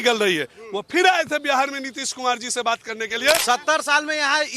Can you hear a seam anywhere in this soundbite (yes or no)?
yes